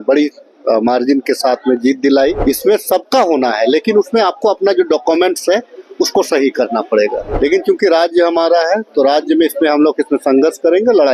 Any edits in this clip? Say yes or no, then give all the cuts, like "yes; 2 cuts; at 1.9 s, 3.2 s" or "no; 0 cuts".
yes; 2 cuts; at 2.4 s, 7.2 s